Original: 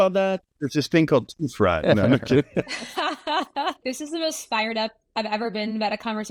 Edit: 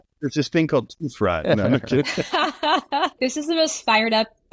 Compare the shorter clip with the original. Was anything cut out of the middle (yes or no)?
yes